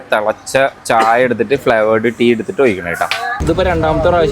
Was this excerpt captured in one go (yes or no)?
no